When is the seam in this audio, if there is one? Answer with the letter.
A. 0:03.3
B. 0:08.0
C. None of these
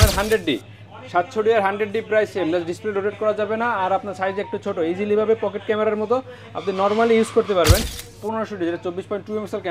B